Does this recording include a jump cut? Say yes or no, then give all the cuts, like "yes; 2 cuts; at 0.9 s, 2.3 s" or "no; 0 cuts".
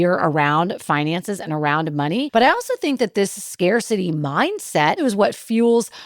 yes; 2 cuts; at 2.3 s, 5.0 s